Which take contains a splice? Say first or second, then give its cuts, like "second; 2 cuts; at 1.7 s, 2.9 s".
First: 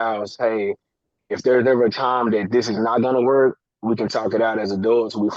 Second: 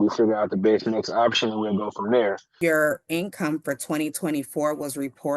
second; 1 cut; at 2.5 s